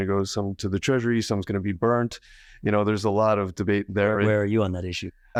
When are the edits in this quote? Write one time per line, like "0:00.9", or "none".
none

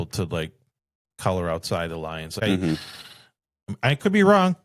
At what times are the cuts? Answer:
0:02.3

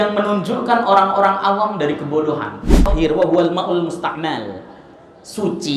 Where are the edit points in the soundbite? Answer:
0:02.9

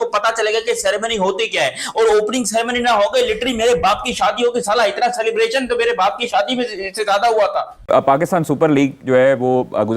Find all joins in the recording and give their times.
0:07.7

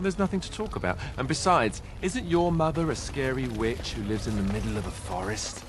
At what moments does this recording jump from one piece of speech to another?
0:01.1

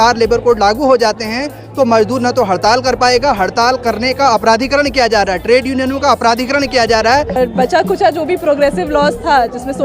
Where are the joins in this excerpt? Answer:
0:07.4

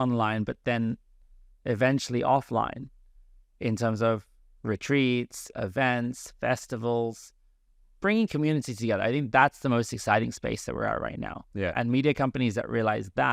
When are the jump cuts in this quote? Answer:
none

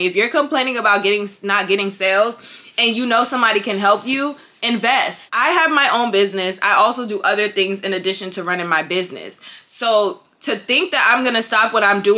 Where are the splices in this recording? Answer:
0:05.2

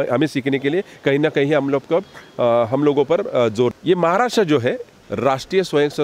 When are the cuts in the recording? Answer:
0:03.7
0:04.9

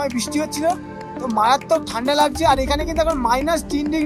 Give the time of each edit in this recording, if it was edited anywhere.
none

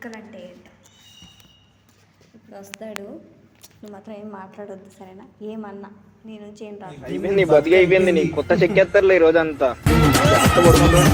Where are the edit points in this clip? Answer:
none

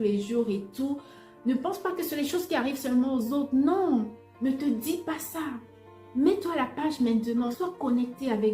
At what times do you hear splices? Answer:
0:04.2
0:07.5

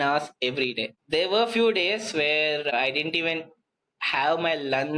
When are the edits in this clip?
0:01.0
0:02.7

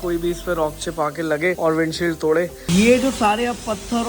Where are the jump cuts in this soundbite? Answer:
0:01.6
0:02.6

